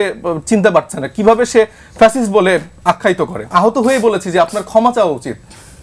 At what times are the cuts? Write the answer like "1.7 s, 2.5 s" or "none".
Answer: 3.4 s